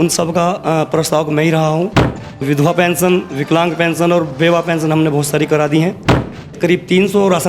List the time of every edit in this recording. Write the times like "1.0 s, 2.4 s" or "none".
1.9 s, 6.5 s